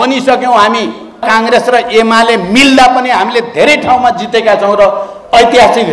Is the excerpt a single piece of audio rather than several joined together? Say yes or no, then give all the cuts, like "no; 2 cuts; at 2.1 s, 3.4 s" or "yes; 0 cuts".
no; 1 cut; at 1.2 s